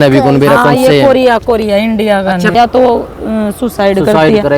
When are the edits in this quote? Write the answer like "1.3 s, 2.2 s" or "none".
2.5 s